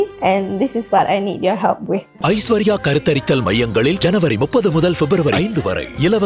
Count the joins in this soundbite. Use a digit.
1